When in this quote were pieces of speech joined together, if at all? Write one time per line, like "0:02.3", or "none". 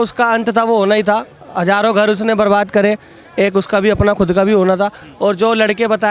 none